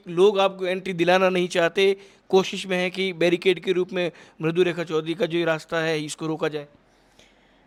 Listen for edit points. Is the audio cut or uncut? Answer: uncut